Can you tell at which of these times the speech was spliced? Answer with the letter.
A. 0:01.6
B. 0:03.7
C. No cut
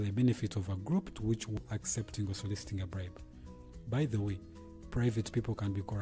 A